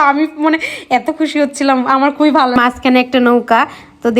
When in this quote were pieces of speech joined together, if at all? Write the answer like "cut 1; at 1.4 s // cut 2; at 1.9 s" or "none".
cut 1; at 2.6 s